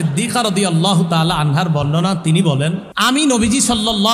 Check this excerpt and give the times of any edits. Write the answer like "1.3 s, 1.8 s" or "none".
2.9 s